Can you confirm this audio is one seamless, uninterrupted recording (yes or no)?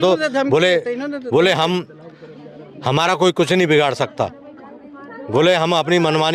yes